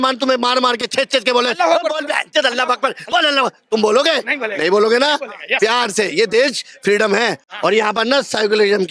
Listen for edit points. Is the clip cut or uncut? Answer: uncut